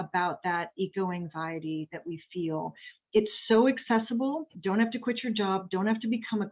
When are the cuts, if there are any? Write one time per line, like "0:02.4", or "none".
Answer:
0:04.5